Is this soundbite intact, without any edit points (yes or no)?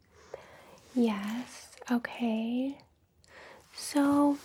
yes